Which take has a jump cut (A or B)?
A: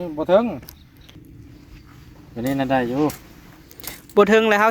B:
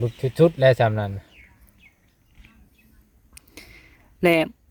A